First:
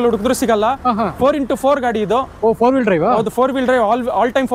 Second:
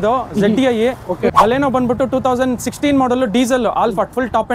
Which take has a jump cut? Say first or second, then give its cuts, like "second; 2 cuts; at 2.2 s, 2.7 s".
second; 1 cut; at 1.3 s